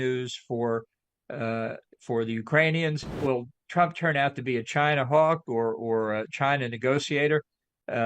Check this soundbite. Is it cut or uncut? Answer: cut